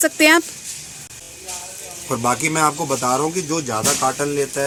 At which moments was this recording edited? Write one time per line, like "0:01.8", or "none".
none